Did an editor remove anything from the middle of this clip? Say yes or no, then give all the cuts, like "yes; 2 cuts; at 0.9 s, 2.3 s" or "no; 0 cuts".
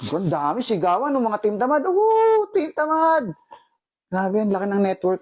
no; 0 cuts